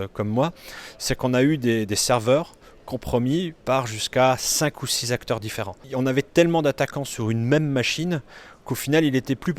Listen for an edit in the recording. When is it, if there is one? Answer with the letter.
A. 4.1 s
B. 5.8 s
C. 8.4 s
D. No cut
B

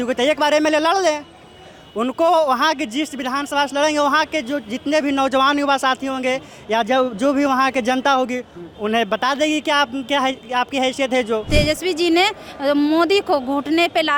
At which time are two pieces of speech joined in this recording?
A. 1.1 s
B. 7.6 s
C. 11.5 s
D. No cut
C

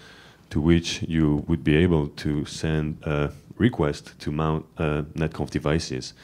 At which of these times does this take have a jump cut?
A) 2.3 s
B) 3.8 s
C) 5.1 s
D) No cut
D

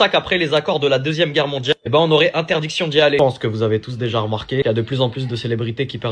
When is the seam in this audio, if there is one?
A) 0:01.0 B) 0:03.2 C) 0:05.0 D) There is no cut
B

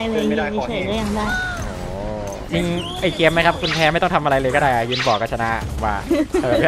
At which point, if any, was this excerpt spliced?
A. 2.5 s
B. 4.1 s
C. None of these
A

